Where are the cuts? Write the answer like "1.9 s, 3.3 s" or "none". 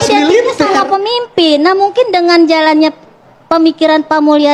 none